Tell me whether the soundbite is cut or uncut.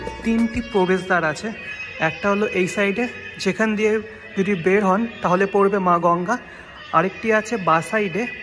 uncut